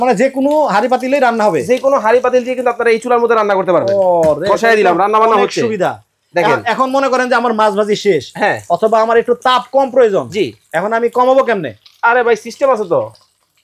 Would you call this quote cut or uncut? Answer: uncut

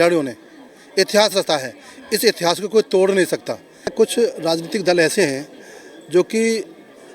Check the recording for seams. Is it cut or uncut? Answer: cut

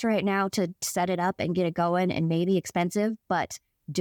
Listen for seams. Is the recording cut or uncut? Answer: uncut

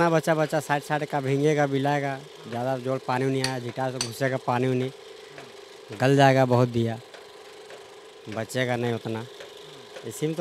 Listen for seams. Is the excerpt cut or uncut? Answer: uncut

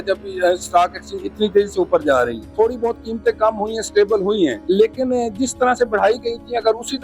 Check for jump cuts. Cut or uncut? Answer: cut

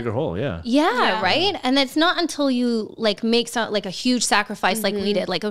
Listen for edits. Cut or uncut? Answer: uncut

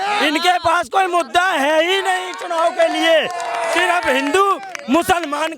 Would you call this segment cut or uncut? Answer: uncut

